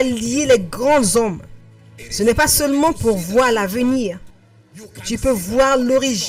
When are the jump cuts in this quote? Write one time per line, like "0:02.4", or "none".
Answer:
none